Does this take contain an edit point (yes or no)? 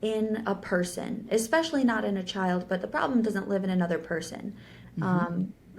no